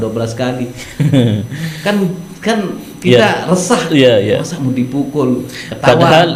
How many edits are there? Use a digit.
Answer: 0